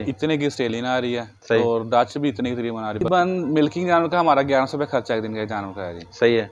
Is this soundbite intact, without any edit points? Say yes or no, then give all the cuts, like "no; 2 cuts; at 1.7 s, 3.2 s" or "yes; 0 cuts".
no; 1 cut; at 3.1 s